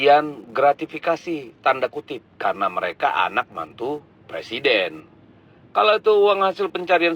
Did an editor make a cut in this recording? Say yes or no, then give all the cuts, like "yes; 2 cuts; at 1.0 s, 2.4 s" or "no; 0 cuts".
no; 0 cuts